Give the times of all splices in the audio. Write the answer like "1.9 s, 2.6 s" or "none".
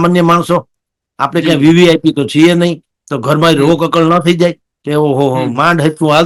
none